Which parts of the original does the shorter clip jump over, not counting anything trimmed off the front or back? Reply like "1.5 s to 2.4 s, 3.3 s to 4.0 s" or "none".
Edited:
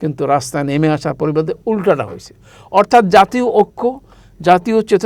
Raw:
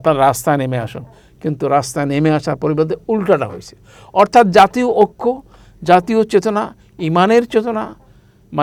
none